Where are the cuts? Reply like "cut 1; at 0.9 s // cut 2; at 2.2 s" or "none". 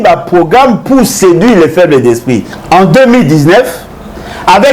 cut 1; at 2.5 s

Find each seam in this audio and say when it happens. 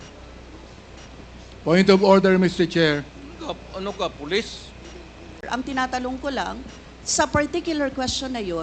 cut 1; at 5.4 s

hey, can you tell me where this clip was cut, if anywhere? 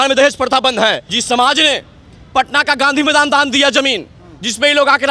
cut 1; at 1.1 s

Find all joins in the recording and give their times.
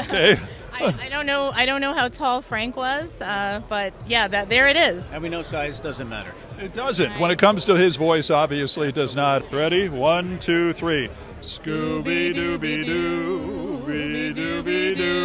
none

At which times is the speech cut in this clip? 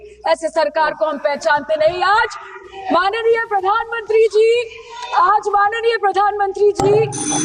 none

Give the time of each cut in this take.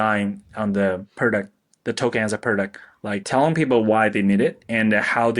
cut 1; at 1.1 s // cut 2; at 3.2 s

